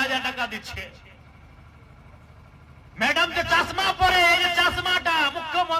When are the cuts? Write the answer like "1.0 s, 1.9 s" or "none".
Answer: none